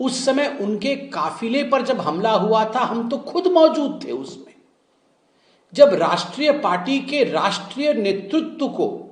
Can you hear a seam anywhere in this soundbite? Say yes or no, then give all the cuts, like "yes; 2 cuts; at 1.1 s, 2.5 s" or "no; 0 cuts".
no; 0 cuts